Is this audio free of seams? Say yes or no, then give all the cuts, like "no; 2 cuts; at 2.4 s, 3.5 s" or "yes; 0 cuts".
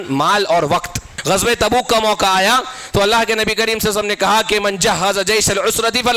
no; 1 cut; at 1.1 s